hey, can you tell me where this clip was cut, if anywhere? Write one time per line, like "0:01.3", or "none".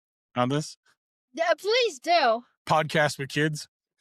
none